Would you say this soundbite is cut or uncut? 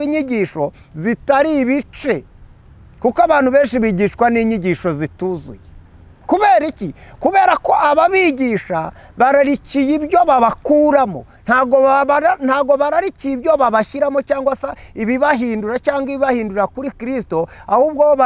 uncut